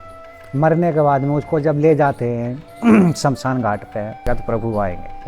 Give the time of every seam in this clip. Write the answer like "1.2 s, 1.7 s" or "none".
4.3 s